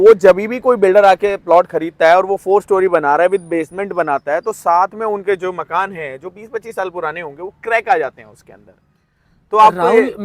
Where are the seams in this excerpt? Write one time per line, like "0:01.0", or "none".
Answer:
none